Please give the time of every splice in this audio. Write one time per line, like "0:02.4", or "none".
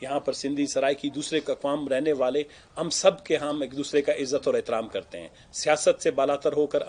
none